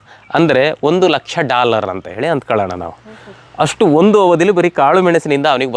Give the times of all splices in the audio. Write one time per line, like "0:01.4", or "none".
none